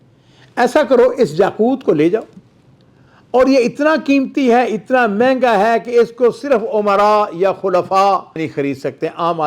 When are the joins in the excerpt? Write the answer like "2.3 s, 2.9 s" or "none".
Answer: 8.4 s

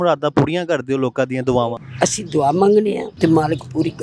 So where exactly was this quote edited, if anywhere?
1.8 s, 3.1 s

